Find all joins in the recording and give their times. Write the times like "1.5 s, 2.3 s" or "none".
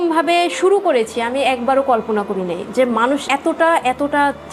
none

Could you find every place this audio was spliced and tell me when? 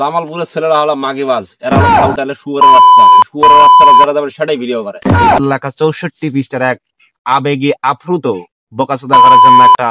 5.4 s

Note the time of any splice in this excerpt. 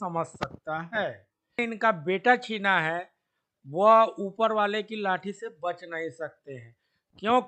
1.6 s

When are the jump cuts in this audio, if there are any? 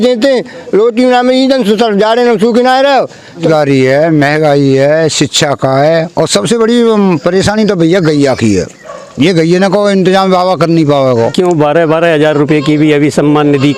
3.4 s, 11.3 s

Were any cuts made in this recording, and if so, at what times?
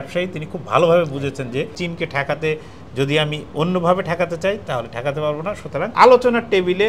1.8 s, 5.9 s

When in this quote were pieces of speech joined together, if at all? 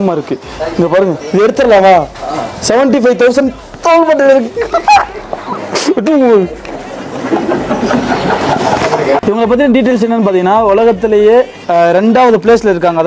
9.2 s, 11.6 s

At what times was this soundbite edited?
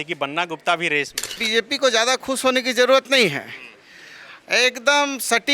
1.4 s

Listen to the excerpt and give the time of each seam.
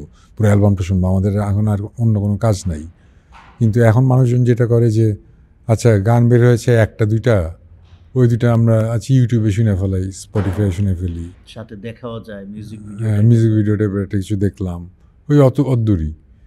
none

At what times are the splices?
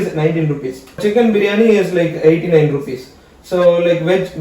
1.0 s

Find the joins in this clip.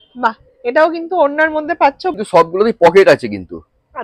2.2 s

